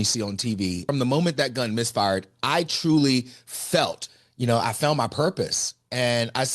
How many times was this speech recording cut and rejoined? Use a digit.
2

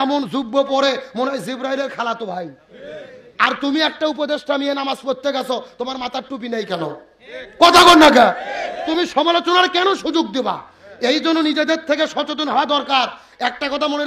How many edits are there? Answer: 0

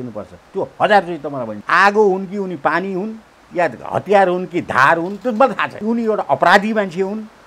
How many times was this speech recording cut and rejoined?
2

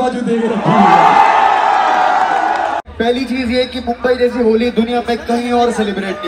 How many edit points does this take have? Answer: 1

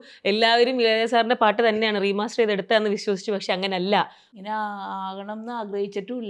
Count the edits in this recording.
1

